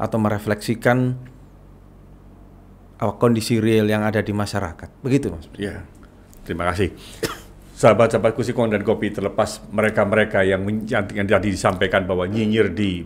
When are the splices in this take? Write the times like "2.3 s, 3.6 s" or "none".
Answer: none

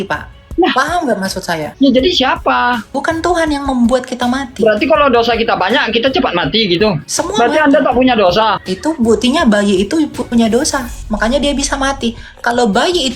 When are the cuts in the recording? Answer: 1.7 s, 2.9 s, 7.1 s, 8.7 s

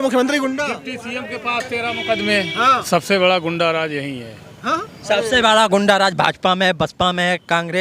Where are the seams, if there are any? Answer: 2.8 s

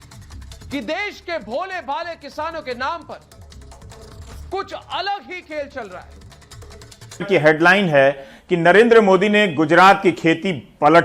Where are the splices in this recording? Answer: 7.3 s

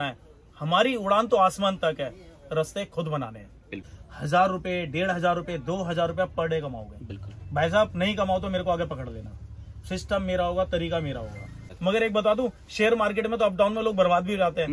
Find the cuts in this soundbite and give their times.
3.9 s, 11.7 s

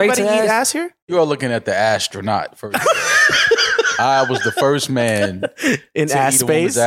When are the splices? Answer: 1.1 s

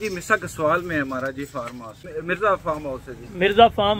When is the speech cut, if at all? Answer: 2.1 s

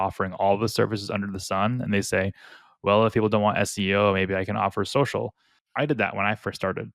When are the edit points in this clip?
5.6 s

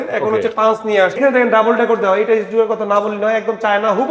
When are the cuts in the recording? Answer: 1.2 s

